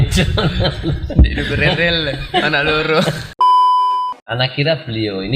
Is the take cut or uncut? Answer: cut